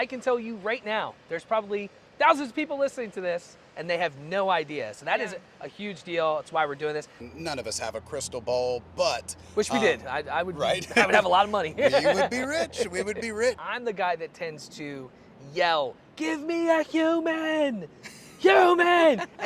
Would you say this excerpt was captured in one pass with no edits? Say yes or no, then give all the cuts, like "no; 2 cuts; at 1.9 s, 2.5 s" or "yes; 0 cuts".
no; 3 cuts; at 2.0 s, 7.1 s, 13.7 s